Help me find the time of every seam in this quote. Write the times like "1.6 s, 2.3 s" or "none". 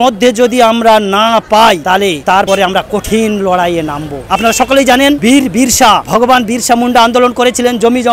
none